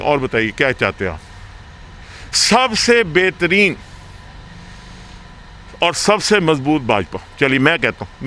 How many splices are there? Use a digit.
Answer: 0